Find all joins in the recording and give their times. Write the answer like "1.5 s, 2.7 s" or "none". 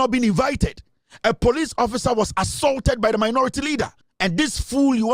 4.0 s